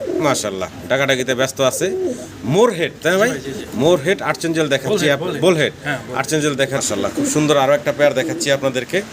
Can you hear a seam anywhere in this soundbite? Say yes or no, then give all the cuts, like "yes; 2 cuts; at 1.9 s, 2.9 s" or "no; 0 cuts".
yes; 1 cut; at 6.8 s